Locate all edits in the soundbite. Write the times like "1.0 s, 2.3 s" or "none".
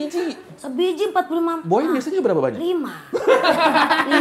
none